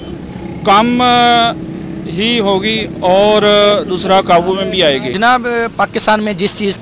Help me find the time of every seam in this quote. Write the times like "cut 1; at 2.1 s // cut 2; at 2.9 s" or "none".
cut 1; at 5.1 s